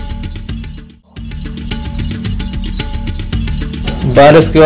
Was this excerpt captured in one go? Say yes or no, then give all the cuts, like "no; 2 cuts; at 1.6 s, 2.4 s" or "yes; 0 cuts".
no; 1 cut; at 1.5 s